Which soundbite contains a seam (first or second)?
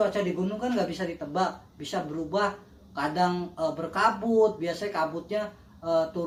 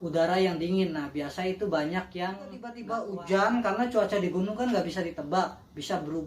second